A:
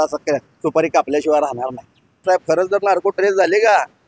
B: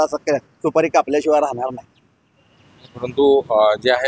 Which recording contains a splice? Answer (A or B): A